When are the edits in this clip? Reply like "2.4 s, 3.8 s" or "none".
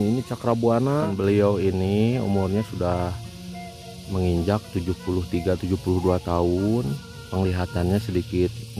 1.1 s